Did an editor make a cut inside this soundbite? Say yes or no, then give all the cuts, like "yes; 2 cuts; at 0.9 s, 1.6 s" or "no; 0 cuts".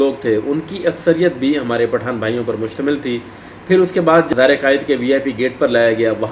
yes; 1 cut; at 4.0 s